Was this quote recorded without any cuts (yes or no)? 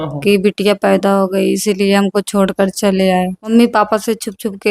no